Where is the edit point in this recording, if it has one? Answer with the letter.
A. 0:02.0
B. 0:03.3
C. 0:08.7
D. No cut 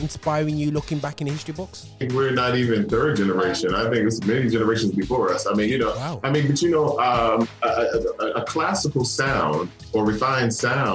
A